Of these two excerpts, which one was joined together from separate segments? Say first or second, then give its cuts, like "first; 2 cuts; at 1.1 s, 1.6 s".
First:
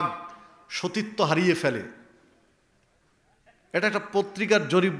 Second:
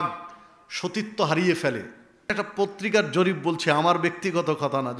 second; 1 cut; at 2.3 s